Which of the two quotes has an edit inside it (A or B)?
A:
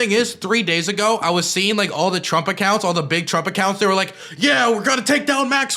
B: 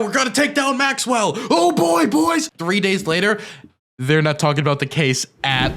B